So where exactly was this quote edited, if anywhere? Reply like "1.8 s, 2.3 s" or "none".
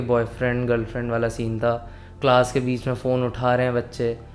none